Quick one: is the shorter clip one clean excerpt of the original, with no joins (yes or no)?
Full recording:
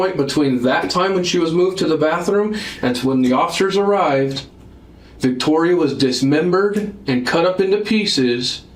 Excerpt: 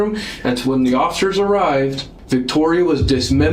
no